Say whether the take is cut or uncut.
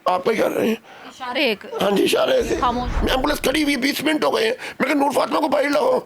cut